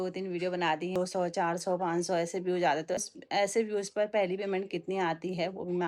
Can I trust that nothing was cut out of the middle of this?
no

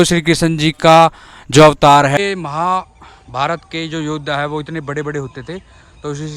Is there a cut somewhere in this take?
yes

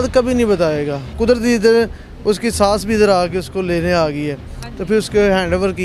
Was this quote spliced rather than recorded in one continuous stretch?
yes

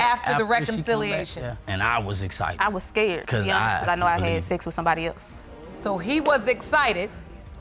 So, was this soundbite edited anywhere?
no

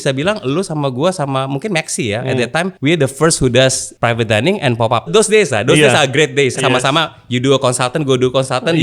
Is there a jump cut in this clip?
yes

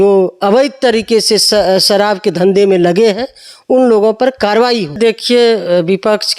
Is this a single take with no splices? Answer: no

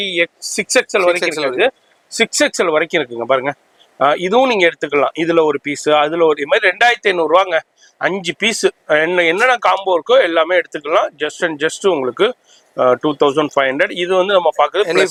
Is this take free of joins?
yes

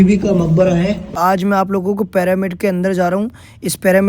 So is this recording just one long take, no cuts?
no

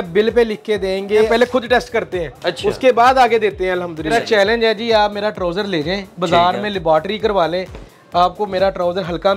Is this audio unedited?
no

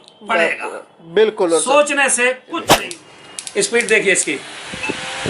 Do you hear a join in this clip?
yes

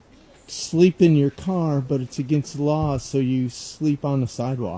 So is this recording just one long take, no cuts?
yes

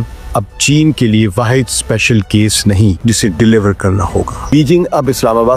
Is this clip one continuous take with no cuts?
no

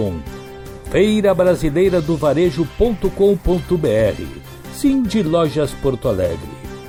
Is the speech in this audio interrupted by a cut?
no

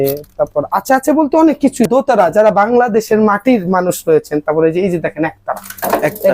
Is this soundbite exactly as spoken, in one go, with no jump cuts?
no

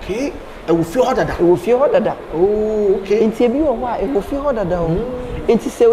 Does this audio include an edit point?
no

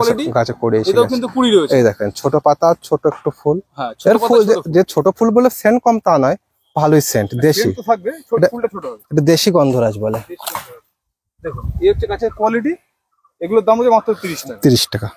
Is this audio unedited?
yes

